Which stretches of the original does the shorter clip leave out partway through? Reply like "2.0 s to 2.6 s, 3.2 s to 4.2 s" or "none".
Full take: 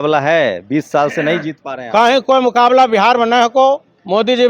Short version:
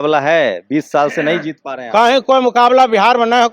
none